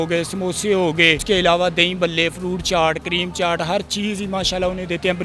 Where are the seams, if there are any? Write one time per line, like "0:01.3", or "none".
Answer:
none